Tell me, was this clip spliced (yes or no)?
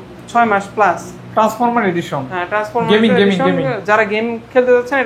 no